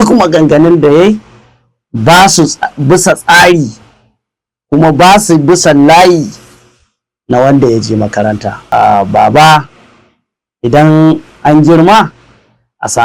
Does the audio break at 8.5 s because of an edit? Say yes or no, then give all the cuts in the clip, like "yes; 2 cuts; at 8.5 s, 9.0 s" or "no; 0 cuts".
yes; 1 cut; at 8.5 s